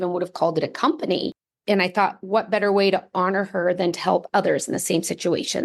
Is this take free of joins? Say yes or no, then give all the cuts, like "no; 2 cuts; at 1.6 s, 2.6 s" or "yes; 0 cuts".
no; 1 cut; at 1.4 s